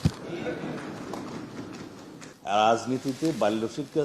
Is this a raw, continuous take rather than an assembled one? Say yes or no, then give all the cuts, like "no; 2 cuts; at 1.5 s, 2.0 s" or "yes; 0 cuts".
no; 1 cut; at 2.2 s